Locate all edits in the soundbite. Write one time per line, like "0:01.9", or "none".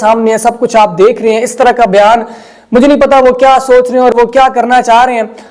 none